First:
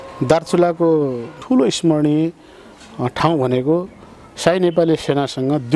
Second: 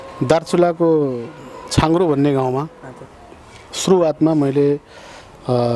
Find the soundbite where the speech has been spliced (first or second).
first